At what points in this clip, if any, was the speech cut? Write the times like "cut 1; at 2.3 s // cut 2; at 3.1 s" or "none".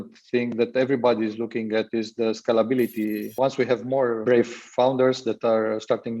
cut 1; at 3.3 s // cut 2; at 4.2 s